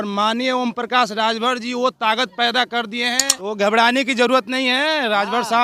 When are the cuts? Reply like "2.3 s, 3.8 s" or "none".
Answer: 3.3 s